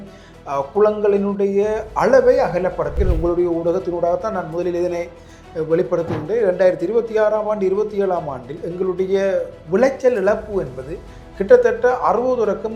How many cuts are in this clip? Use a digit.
1